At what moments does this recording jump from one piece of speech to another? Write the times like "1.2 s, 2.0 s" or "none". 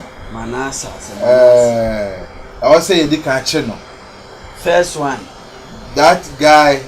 none